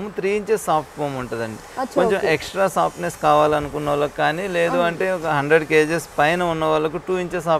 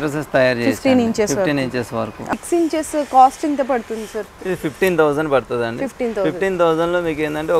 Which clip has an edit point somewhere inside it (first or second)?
second